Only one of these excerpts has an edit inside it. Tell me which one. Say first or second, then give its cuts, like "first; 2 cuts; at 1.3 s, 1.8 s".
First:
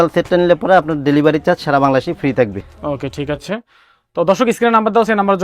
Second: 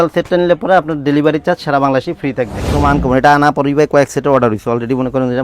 second; 1 cut; at 2.6 s